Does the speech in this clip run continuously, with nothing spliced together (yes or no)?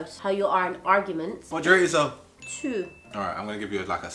no